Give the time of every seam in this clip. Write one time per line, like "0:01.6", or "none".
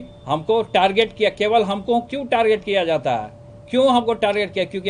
none